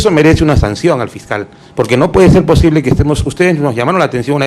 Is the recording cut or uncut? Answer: uncut